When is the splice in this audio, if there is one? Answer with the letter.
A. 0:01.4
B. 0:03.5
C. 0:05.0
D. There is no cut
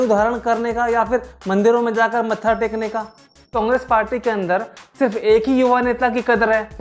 B